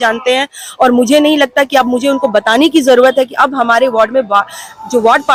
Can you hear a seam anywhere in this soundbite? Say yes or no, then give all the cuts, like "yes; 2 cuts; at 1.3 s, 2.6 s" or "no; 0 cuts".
no; 0 cuts